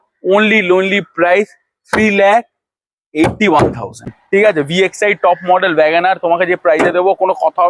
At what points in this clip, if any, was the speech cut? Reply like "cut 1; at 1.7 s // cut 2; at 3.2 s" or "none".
cut 1; at 4.2 s